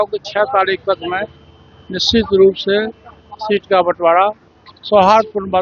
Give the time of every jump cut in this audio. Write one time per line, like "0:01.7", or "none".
none